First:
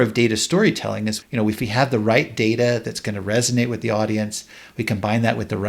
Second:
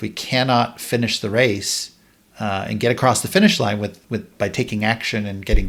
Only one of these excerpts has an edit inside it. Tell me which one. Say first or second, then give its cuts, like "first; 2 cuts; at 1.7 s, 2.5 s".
first; 1 cut; at 1.2 s